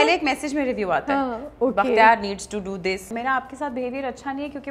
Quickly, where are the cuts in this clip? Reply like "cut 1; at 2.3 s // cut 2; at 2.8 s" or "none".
cut 1; at 3.1 s